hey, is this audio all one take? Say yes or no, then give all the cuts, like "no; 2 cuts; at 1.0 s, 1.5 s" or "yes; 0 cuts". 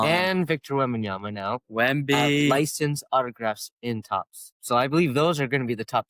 yes; 0 cuts